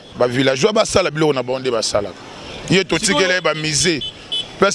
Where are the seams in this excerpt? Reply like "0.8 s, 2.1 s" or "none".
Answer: none